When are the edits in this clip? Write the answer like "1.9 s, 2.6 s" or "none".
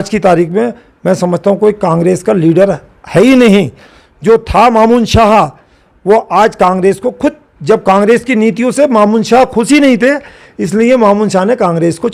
none